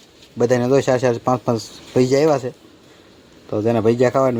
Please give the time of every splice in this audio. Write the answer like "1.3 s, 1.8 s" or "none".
none